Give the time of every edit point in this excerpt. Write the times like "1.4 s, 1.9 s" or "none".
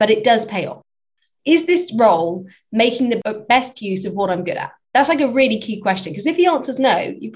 1.1 s, 3.2 s, 4.7 s